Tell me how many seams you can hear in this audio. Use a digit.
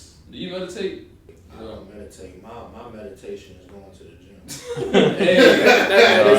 1